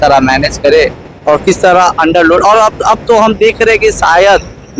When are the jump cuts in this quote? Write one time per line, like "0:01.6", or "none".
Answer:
none